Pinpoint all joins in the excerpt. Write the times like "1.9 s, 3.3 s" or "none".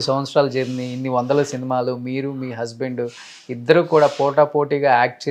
none